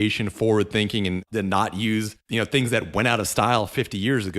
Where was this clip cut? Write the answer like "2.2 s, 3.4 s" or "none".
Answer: 1.2 s, 2.2 s